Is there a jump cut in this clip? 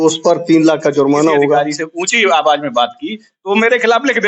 yes; 1 cut; at 1.6 s

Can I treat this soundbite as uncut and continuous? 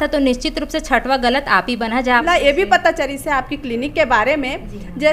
no; 1 cut; at 2.0 s

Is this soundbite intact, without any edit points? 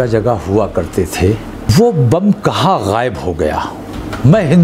no; 1 cut; at 1.7 s

